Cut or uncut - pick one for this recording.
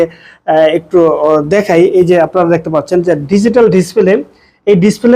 uncut